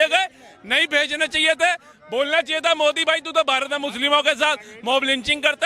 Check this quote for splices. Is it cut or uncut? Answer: uncut